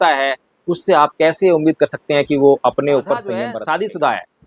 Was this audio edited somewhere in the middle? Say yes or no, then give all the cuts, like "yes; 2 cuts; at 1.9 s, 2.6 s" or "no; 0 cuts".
yes; 1 cut; at 3.4 s